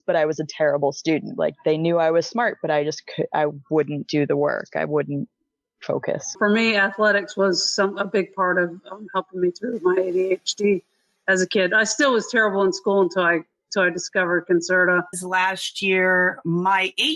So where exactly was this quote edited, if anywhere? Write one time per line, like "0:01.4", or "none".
0:01.3
0:06.3
0:15.2

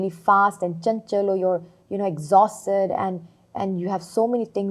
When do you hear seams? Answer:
none

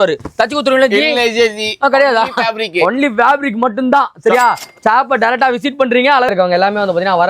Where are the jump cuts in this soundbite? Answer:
0:06.3

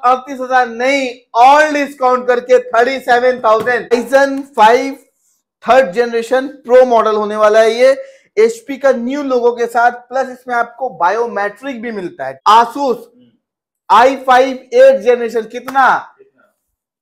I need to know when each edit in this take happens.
0:03.9
0:12.2

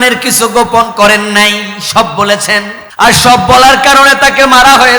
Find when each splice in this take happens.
0:02.8

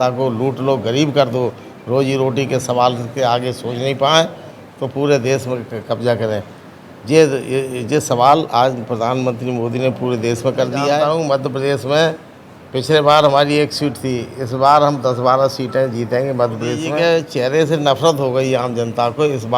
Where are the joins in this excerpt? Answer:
0:11.0
0:16.9

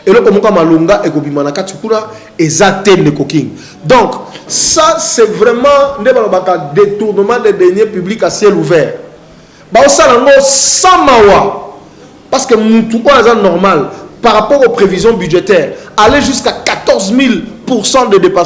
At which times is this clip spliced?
none

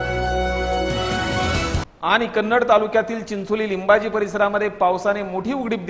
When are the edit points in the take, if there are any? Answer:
0:01.8

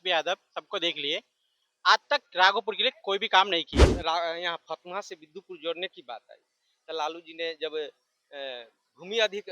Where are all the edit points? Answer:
0:03.8

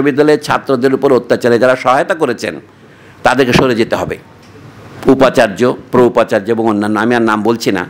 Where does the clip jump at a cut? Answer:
none

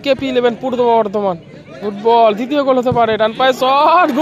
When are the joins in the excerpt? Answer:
none

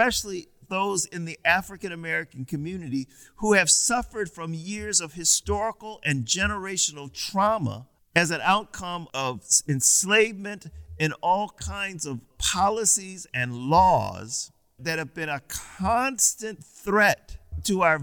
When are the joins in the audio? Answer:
0:12.4

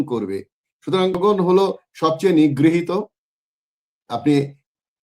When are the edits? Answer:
0:01.2

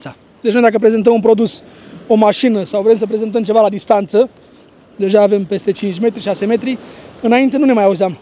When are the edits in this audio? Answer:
none

